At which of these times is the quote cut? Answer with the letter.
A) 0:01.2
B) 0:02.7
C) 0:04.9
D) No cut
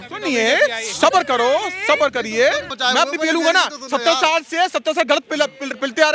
B